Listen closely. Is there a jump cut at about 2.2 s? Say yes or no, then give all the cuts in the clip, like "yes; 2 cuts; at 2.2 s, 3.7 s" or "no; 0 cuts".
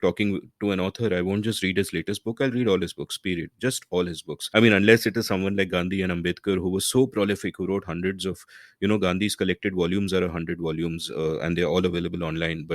no; 1 cut; at 4.3 s